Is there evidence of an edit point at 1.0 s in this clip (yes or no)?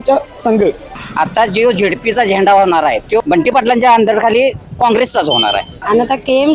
yes